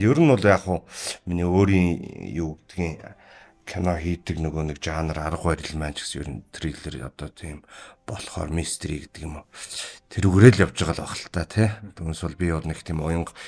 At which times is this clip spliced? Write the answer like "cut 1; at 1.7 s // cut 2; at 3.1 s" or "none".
none